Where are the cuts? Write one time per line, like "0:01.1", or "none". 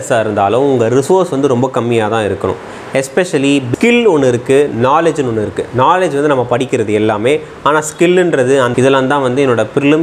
0:03.7
0:08.7